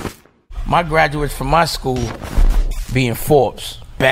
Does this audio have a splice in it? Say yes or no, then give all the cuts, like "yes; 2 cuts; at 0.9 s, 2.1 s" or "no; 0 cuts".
no; 0 cuts